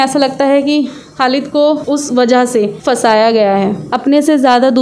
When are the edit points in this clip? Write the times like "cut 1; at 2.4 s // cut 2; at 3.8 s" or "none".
cut 1; at 1.8 s // cut 2; at 2.8 s // cut 3; at 3.9 s